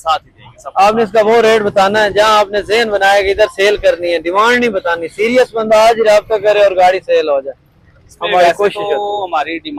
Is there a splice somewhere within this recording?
no; 0 cuts

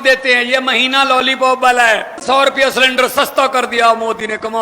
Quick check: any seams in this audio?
yes; 1 cut; at 2.2 s

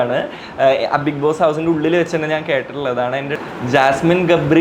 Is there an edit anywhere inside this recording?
yes; 1 cut; at 3.4 s

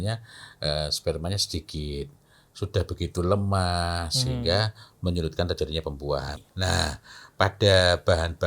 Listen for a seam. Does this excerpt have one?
yes; 1 cut; at 6.3 s

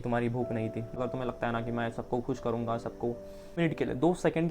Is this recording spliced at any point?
yes; 2 cuts; at 1.0 s, 3.6 s

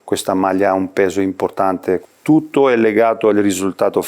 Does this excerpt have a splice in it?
yes; 1 cut; at 2.0 s

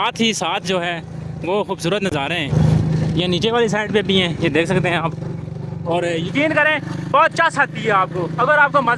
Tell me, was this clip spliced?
no; 0 cuts

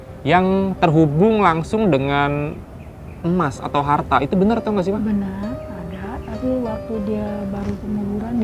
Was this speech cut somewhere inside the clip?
no; 0 cuts

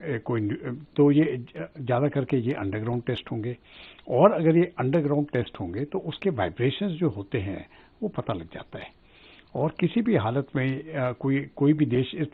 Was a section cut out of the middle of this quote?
no; 0 cuts

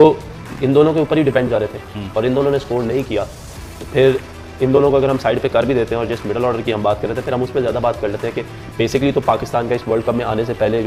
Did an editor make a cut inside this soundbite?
no; 0 cuts

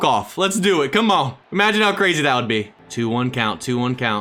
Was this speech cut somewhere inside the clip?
no; 0 cuts

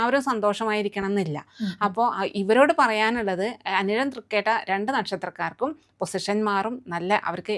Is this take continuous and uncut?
yes; 0 cuts

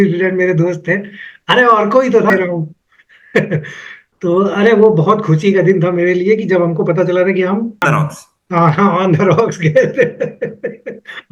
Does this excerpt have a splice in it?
yes; 2 cuts; at 2.3 s, 7.8 s

